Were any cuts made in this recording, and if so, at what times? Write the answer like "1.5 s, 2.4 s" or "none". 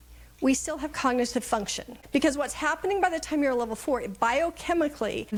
none